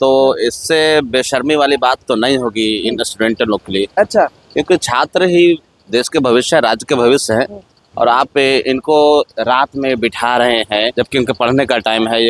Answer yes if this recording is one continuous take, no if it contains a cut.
no